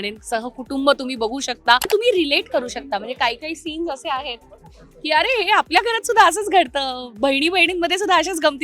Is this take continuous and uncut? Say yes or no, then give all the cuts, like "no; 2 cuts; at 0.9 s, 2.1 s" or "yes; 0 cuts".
no; 1 cut; at 1.9 s